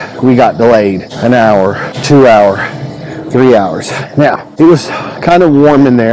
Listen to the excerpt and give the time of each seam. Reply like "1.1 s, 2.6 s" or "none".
1.1 s, 1.9 s, 4.5 s